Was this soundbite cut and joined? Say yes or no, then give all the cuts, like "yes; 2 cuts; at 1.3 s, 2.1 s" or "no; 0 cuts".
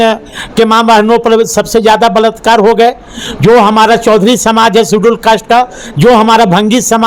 no; 0 cuts